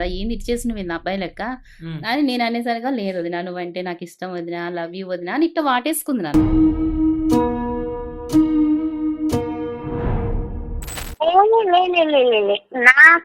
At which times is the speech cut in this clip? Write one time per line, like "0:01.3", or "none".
0:11.0